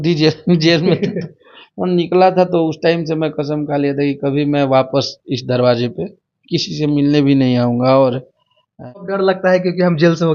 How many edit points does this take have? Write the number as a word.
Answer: one